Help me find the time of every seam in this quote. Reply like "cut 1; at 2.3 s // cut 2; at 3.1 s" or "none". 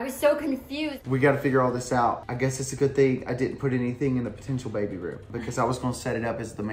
cut 1; at 0.9 s // cut 2; at 2.3 s